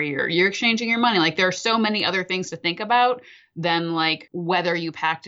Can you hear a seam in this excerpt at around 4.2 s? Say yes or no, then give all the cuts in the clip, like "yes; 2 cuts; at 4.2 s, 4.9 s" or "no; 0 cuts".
yes; 1 cut; at 4.2 s